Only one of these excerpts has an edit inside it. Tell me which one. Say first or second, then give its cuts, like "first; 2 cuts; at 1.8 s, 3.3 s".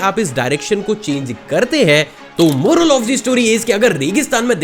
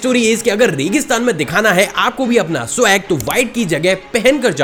first; 1 cut; at 2.2 s